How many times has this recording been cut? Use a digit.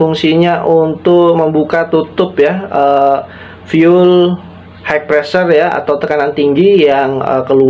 0